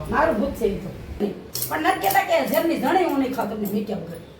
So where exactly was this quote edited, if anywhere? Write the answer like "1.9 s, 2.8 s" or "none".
1.2 s

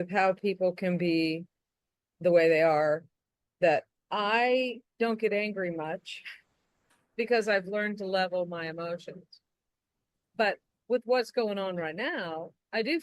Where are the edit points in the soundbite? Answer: 4.0 s

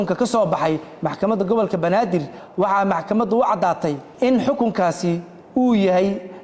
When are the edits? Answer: 2.4 s, 4.1 s

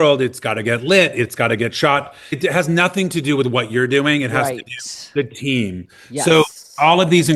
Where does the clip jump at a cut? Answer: none

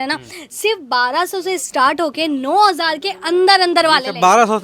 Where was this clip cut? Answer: none

